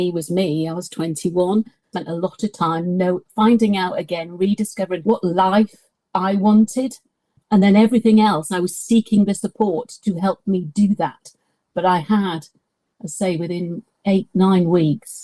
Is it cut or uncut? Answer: cut